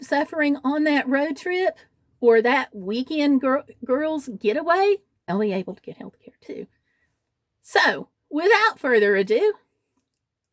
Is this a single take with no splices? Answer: no; 1 cut; at 5.3 s

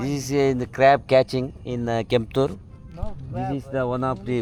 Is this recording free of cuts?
yes; 0 cuts

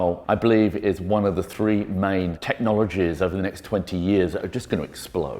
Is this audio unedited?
yes; 0 cuts

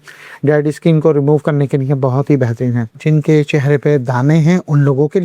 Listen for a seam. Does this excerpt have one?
yes; 1 cut; at 3.0 s

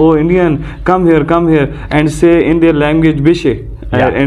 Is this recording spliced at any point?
no; 0 cuts

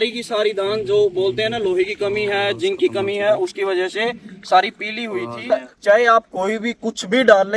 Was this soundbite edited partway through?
yes; 1 cut; at 5.5 s

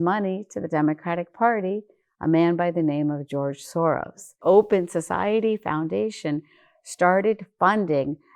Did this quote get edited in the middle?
yes; 1 cut; at 4.4 s

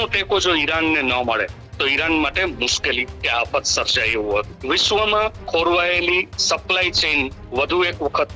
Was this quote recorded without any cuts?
no; 1 cut; at 4.5 s

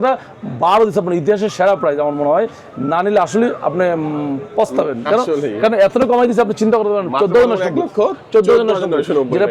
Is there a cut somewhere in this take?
no; 0 cuts

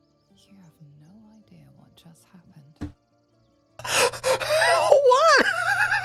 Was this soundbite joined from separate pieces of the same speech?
no; 0 cuts

